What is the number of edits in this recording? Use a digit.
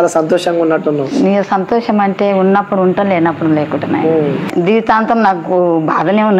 1